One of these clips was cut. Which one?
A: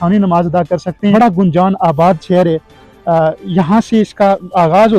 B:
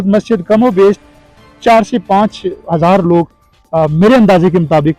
A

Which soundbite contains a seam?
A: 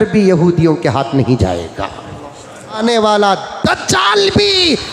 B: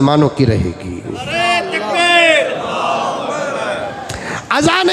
A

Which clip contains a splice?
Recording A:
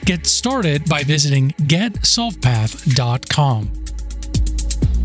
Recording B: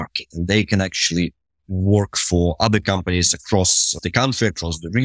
B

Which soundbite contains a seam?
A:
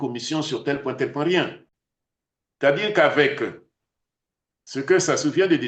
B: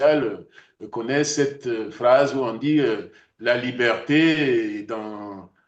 A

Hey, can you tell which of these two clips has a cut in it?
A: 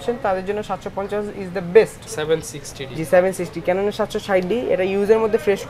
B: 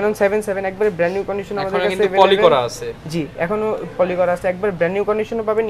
A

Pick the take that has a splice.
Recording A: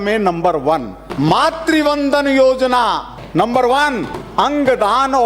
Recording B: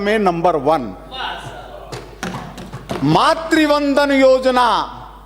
A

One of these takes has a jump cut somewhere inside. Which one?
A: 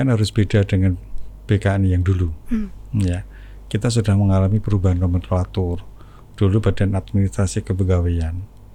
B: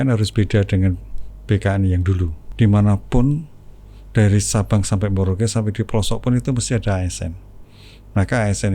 B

